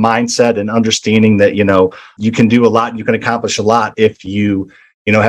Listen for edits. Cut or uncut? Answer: uncut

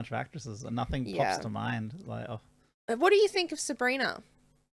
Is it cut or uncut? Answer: uncut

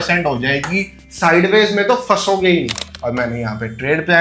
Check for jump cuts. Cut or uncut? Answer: cut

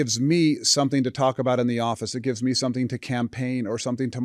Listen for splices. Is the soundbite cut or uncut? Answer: uncut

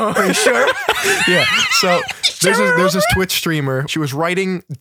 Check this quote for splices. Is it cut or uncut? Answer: cut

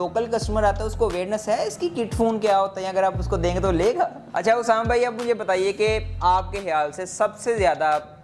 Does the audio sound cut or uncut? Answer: cut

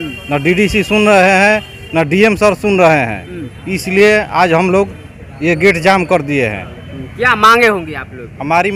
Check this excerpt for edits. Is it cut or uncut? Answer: uncut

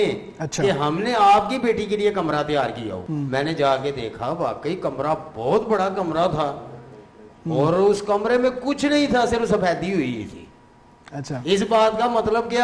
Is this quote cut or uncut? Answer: cut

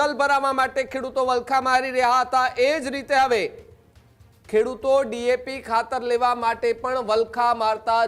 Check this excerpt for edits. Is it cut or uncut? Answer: uncut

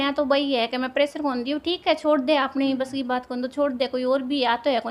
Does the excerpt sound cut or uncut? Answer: uncut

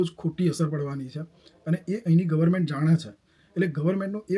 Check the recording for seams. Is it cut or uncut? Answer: uncut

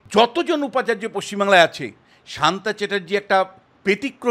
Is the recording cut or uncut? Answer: uncut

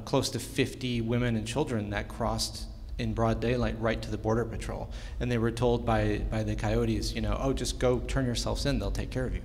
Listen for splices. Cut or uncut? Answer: uncut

